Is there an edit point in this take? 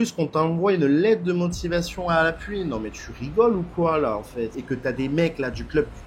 yes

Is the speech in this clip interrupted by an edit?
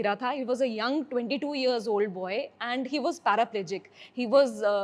no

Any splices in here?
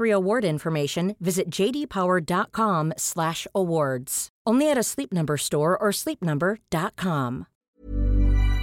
yes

